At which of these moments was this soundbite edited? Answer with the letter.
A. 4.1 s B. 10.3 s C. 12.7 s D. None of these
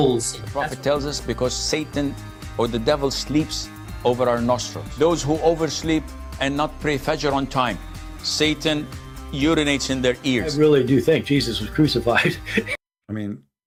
D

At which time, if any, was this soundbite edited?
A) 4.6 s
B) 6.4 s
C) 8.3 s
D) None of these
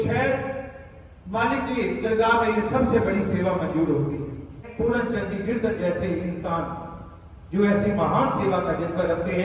A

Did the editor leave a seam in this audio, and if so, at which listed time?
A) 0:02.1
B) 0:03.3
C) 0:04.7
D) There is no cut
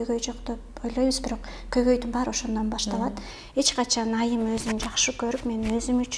B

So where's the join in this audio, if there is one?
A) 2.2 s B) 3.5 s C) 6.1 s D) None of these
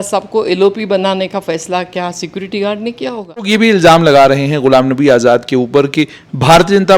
B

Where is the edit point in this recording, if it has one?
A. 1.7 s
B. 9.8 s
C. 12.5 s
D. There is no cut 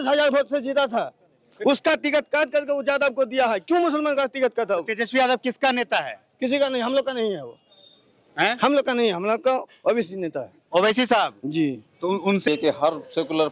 C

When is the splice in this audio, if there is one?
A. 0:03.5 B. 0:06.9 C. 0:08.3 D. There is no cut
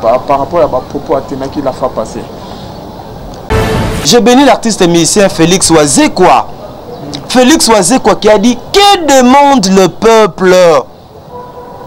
A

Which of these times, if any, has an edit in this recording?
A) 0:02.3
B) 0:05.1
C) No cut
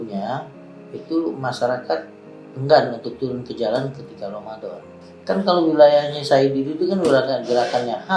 B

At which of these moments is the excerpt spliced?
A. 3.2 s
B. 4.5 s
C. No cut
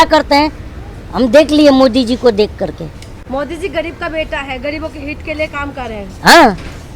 C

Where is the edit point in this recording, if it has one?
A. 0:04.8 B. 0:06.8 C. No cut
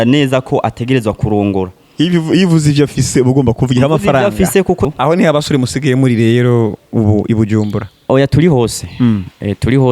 A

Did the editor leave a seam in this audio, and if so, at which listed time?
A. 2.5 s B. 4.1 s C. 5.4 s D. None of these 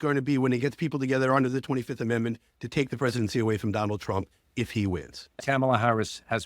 C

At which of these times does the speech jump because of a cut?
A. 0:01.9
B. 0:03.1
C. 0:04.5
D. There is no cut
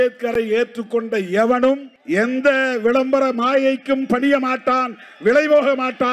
A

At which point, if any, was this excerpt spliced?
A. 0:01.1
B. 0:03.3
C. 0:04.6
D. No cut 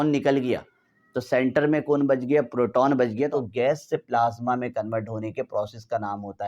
B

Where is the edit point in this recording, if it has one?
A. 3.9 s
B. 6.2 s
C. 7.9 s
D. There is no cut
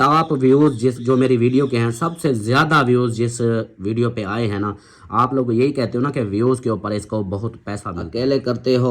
C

